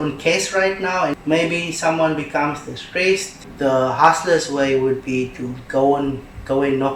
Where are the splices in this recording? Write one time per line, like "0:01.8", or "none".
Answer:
0:01.1
0:03.4